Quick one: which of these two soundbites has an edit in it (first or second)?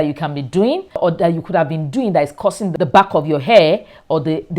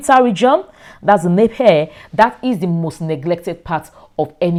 first